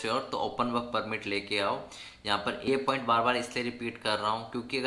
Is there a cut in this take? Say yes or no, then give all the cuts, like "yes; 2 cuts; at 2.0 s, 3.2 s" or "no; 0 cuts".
yes; 1 cut; at 2.7 s